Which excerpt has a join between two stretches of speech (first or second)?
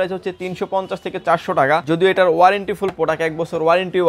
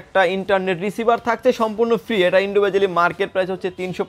first